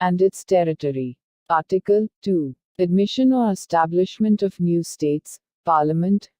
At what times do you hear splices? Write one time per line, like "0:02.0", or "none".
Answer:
0:01.5

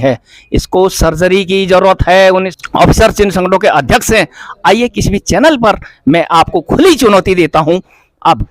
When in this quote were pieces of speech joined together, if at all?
0:02.5

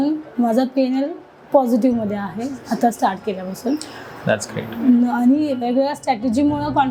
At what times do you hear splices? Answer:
none

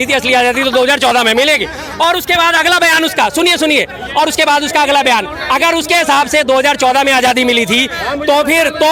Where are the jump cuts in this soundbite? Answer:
none

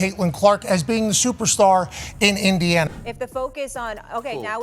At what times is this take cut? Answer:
0:02.9

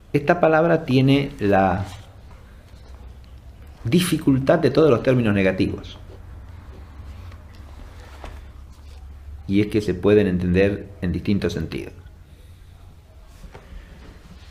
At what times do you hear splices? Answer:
0:04.3

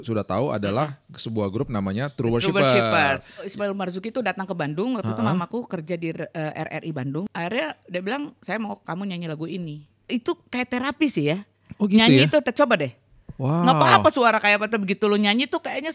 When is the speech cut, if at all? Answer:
0:03.5
0:07.3
0:09.9

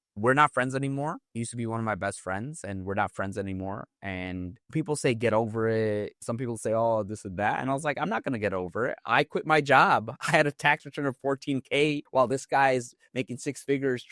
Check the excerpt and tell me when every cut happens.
none

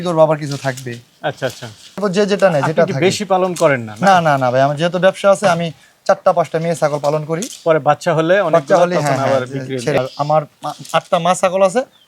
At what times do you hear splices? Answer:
0:02.0
0:10.0

